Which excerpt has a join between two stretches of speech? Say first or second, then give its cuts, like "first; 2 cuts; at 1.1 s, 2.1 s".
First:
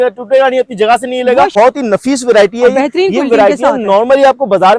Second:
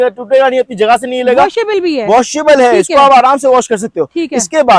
first; 1 cut; at 1.5 s